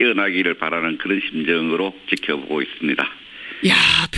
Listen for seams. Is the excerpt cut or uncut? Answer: cut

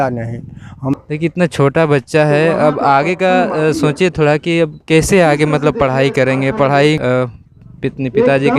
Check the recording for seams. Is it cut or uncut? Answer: cut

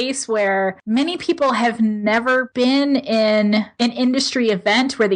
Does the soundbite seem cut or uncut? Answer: cut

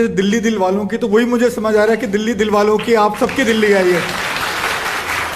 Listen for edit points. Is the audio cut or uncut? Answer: uncut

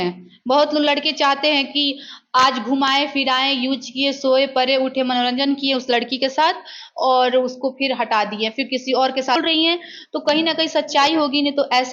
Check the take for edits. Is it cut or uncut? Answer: cut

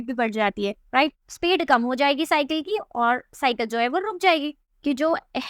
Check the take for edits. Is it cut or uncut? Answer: cut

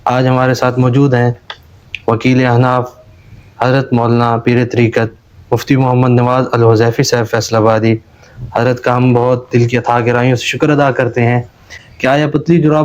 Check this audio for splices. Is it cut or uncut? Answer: cut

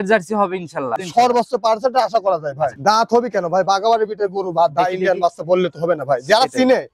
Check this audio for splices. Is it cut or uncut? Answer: cut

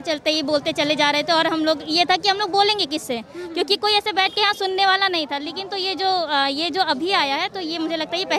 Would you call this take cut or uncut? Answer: uncut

